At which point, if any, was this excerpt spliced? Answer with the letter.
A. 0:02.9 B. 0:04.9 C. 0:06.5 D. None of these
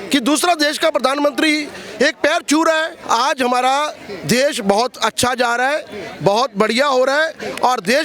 A